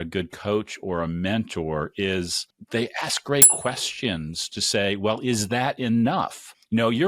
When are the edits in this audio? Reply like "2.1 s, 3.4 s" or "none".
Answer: none